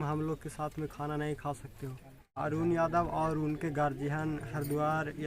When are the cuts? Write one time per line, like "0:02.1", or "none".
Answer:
0:02.4